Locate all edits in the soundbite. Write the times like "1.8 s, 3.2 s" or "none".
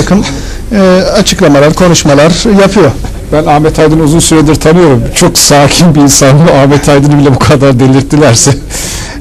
none